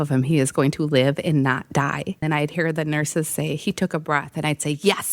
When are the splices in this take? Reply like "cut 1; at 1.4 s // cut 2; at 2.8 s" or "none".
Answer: cut 1; at 2.2 s